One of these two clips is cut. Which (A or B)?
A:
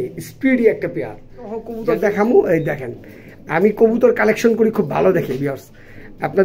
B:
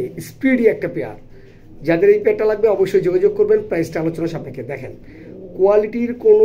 A